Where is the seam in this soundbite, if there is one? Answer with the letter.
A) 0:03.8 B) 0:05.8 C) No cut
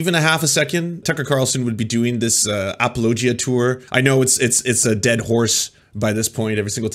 A